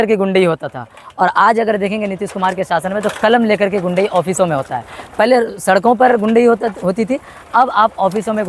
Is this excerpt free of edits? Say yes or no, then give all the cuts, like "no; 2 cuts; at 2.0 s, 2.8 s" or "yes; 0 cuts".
yes; 0 cuts